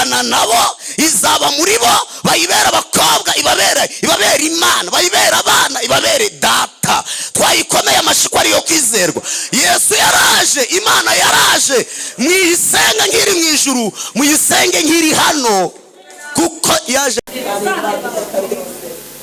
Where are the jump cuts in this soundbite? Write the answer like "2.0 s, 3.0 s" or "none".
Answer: none